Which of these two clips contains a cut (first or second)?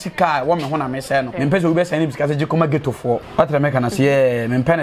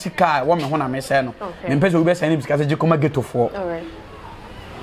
first